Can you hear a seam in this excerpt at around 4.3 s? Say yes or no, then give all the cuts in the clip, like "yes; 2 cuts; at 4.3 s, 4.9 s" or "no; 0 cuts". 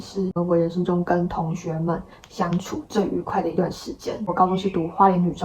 yes; 1 cut; at 4.3 s